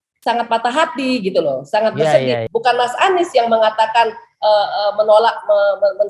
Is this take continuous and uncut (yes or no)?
yes